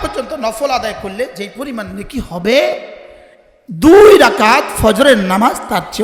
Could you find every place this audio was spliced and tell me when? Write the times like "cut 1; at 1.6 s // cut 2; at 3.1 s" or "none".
none